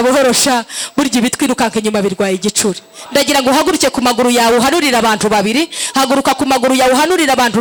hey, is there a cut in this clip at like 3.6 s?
no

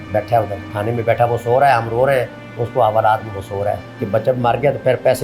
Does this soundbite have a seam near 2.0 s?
no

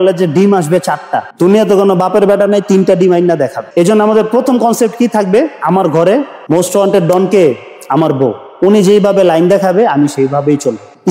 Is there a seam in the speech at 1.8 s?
no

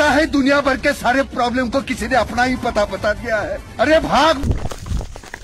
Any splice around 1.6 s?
no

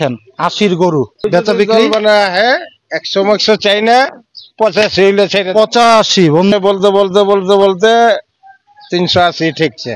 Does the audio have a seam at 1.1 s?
yes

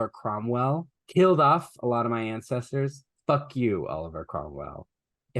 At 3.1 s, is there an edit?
no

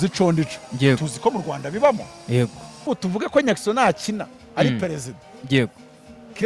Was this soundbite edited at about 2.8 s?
yes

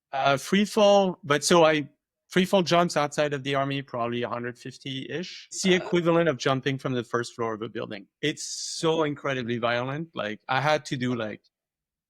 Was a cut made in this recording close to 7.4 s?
no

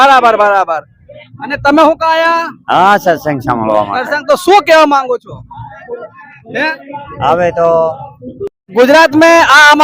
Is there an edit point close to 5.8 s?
no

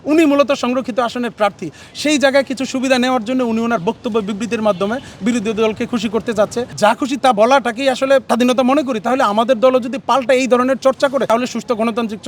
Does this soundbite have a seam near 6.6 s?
yes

